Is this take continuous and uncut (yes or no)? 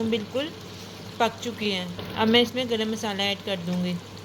yes